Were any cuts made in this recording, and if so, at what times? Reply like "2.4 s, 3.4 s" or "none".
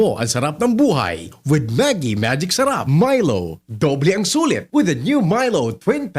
2.8 s